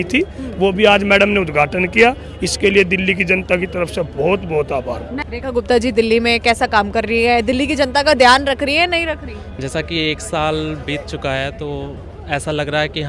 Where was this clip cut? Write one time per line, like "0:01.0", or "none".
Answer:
0:05.2